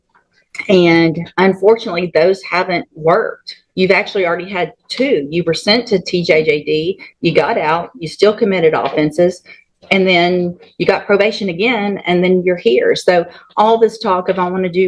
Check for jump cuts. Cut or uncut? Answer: uncut